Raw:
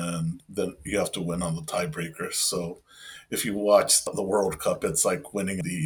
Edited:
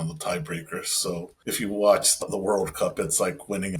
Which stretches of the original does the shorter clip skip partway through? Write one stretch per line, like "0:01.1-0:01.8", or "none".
0:02.8-0:03.2